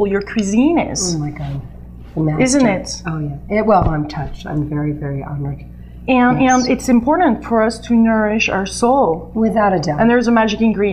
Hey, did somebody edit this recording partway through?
yes; 1 cut; at 8.1 s

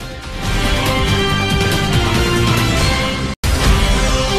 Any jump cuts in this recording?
yes; 1 cut; at 3.3 s

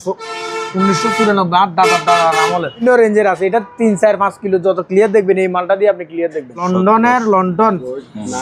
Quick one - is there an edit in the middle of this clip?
yes; 2 cuts; at 2.8 s, 6.6 s

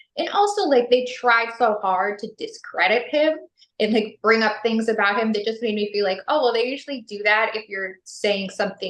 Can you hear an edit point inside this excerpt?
no; 0 cuts

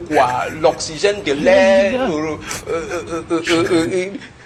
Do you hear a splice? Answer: no; 0 cuts

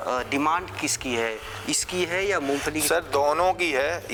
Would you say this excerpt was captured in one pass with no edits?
yes; 0 cuts

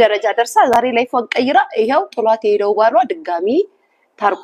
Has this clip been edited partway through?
no; 0 cuts

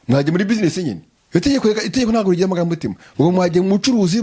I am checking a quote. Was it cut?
yes; 1 cut; at 1.1 s

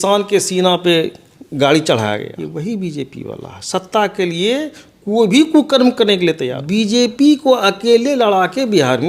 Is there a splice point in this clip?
yes; 2 cuts; at 2.3 s, 6.5 s

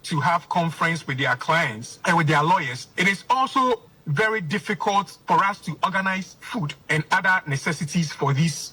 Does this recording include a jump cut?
yes; 3 cuts; at 1.8 s, 5.1 s, 6.8 s

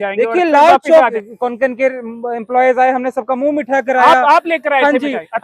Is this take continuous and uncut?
no; 1 cut; at 1.2 s

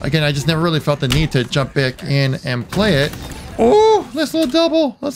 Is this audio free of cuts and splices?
yes; 0 cuts

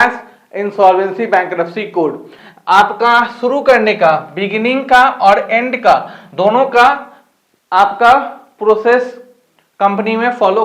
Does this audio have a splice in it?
yes; 1 cut; at 2.4 s

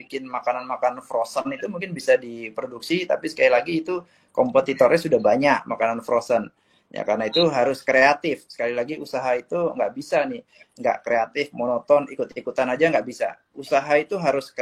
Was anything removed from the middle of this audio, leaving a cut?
no; 0 cuts

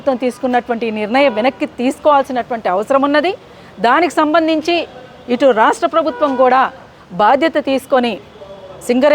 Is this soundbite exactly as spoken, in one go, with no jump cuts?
yes; 0 cuts

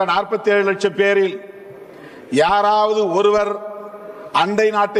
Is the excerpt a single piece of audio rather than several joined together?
yes; 0 cuts

